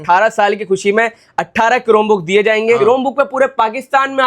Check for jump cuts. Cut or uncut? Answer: cut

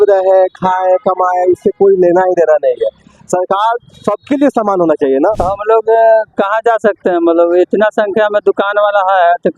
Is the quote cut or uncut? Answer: cut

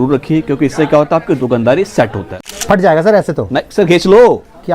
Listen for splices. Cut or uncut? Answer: cut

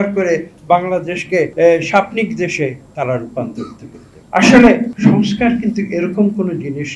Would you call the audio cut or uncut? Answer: cut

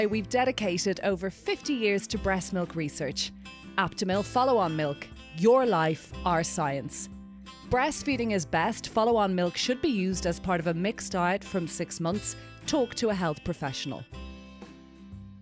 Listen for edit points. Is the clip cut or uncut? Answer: cut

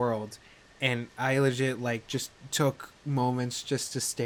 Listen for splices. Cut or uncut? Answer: uncut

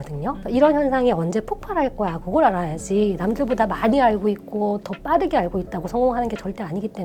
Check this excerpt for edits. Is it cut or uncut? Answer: uncut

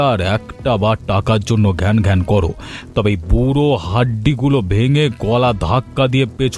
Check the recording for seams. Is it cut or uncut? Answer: uncut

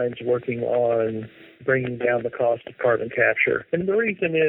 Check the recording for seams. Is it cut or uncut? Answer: uncut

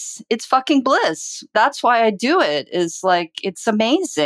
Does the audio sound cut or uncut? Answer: cut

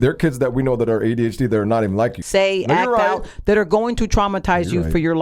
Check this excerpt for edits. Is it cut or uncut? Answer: cut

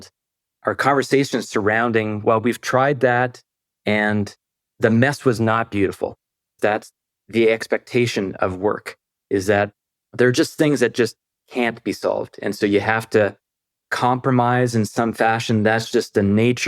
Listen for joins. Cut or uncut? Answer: cut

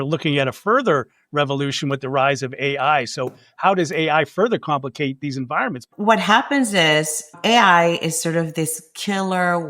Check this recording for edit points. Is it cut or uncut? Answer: cut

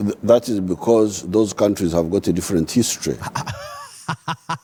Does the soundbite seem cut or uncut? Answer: uncut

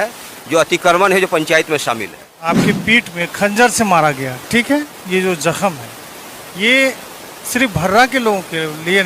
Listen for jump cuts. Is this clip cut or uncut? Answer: cut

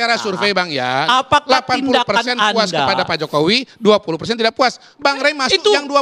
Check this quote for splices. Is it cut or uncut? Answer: uncut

